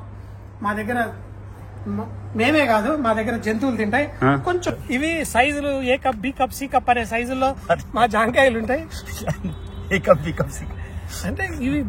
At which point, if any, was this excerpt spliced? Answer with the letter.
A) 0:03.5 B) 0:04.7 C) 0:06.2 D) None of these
B